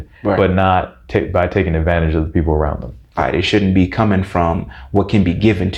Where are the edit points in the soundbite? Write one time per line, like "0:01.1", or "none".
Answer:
0:03.2